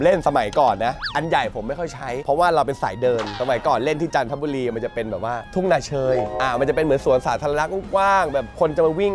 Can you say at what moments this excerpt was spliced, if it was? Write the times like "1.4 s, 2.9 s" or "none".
none